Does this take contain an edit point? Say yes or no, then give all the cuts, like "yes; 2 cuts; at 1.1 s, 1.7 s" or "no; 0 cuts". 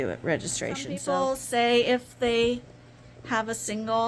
yes; 1 cut; at 1.0 s